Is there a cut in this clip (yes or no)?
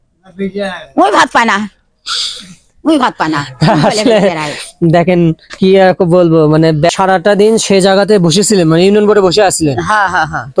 yes